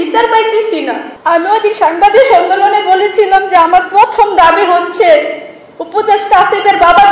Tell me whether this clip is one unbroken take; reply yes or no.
no